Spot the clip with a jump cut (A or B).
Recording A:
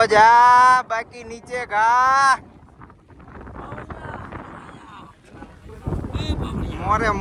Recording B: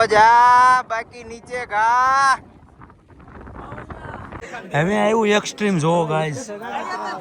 B